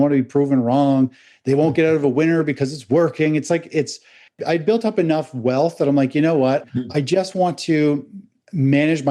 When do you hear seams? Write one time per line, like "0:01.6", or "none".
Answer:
0:04.4
0:06.7